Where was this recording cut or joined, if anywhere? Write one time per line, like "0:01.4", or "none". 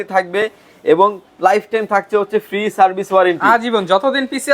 none